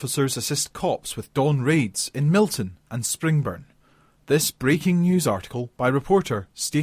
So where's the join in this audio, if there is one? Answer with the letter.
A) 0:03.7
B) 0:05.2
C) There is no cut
C